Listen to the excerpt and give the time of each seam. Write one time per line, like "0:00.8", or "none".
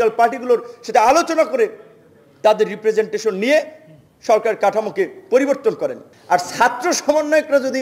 0:06.1